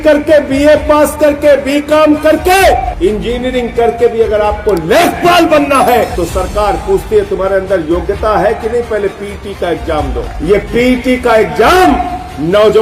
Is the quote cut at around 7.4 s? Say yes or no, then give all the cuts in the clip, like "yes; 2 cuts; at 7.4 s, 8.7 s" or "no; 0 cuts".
no; 3 cuts; at 2.9 s, 6.1 s, 10.3 s